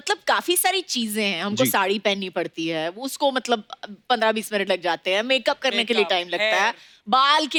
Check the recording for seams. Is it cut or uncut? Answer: uncut